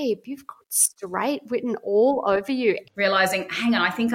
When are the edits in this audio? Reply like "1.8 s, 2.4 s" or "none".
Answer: 2.8 s